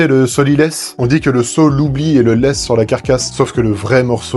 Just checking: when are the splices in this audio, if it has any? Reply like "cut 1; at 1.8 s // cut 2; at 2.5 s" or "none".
cut 1; at 0.9 s // cut 2; at 3.3 s